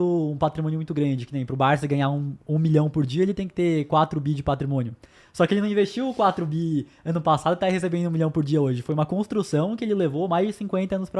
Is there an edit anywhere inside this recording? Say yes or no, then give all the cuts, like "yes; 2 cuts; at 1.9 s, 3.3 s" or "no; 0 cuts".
no; 0 cuts